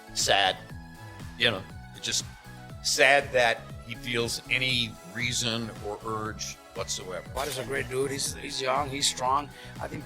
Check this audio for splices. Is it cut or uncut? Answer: cut